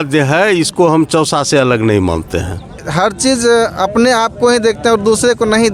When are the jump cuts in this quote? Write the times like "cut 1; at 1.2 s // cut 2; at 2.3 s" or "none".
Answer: cut 1; at 2.8 s